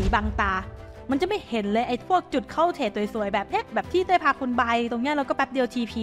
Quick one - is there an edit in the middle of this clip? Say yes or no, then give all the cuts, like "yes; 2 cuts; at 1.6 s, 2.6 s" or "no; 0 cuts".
no; 0 cuts